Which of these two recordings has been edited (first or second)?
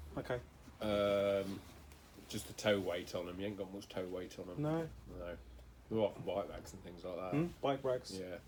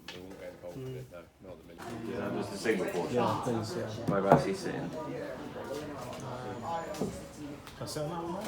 second